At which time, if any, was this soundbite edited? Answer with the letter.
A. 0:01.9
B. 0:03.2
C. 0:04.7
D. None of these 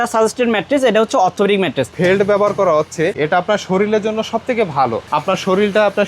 A